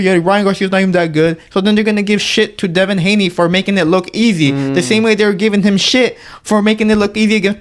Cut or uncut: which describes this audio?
uncut